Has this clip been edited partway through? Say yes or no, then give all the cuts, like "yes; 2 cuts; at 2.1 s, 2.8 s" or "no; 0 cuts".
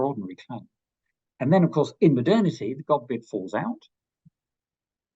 no; 0 cuts